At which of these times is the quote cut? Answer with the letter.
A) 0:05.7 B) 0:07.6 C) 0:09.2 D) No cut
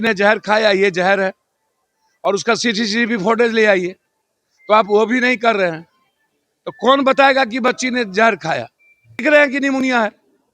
C